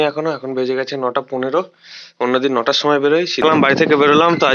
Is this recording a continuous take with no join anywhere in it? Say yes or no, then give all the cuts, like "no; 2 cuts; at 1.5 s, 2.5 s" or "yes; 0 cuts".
no; 1 cut; at 3.4 s